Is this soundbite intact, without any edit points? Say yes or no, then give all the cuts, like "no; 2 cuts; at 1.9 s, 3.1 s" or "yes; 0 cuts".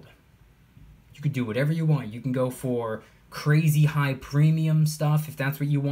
yes; 0 cuts